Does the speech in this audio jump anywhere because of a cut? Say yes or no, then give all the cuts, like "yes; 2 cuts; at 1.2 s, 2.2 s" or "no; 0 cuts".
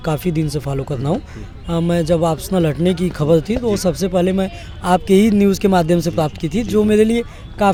no; 0 cuts